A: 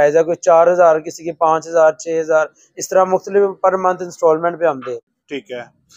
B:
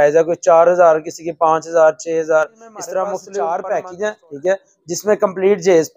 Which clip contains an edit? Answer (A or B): B